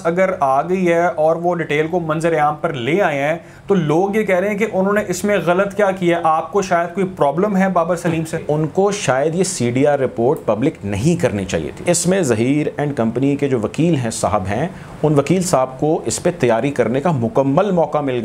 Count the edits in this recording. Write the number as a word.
two